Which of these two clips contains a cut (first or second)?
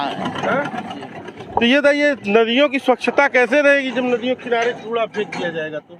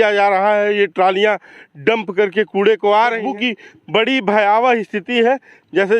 second